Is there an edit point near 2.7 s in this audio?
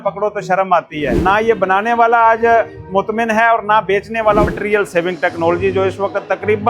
no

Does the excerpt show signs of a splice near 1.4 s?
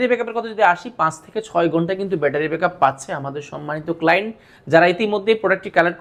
no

